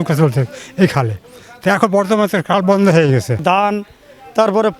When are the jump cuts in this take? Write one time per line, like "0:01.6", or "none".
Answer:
0:03.4